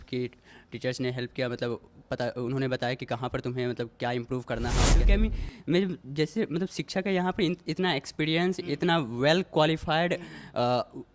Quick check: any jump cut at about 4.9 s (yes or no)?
yes